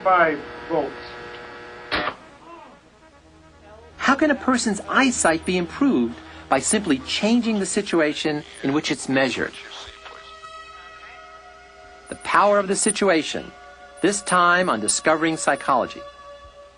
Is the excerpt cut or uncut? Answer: cut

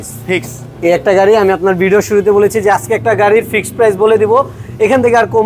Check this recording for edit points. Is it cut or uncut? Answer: uncut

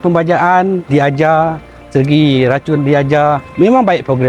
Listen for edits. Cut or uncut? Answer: uncut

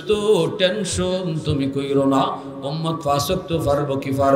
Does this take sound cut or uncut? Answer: uncut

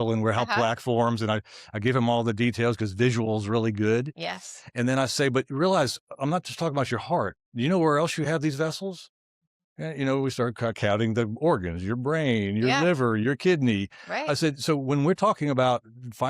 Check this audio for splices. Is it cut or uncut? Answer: uncut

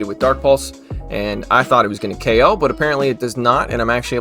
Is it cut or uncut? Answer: uncut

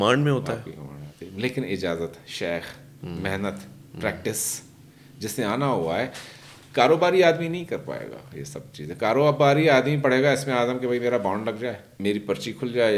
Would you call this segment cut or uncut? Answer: cut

